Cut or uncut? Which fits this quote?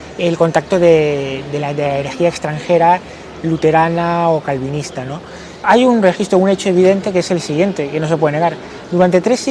cut